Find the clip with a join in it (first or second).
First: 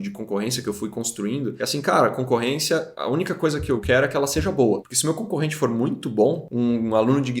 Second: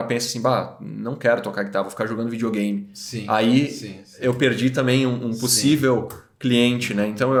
first